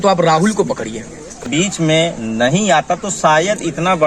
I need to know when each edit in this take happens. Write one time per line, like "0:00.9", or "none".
0:01.4